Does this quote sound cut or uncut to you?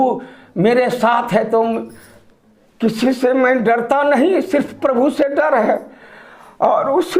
uncut